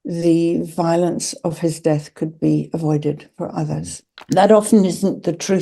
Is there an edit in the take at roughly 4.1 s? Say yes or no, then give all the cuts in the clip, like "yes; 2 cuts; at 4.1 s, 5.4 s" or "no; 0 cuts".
yes; 1 cut; at 4.1 s